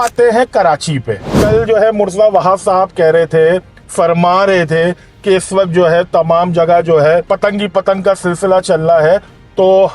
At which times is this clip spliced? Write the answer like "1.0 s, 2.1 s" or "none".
1.3 s